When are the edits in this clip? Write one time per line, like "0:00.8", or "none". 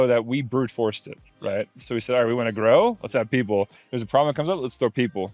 none